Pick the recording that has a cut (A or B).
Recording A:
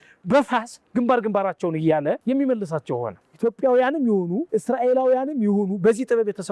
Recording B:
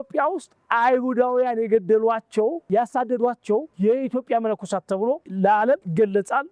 A